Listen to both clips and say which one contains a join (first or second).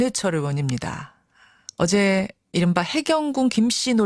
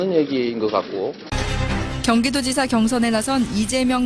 second